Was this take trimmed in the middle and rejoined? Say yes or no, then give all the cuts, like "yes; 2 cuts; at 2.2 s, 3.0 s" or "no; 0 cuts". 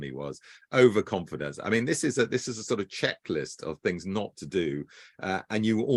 no; 0 cuts